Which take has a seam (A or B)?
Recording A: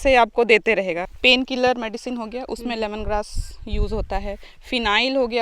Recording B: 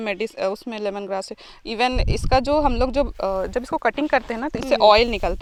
A